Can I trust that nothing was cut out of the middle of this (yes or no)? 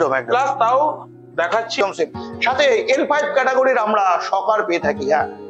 no